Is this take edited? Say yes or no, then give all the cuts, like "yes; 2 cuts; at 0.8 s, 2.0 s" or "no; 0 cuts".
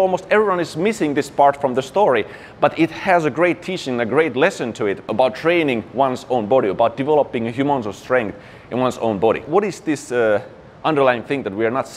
yes; 2 cuts; at 5.1 s, 9.4 s